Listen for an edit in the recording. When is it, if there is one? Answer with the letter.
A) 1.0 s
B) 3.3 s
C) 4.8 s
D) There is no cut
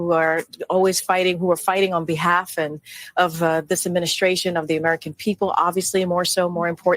C